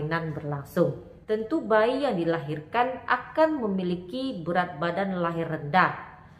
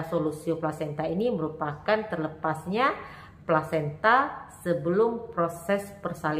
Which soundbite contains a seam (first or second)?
first